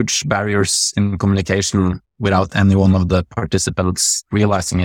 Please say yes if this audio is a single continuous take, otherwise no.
yes